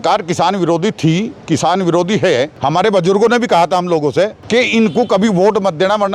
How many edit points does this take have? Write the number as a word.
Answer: two